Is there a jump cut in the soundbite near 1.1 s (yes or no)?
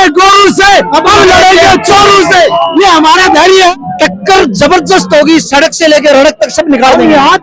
no